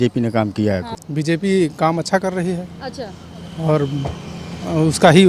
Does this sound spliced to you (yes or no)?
yes